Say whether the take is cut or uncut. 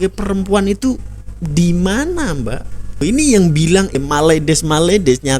cut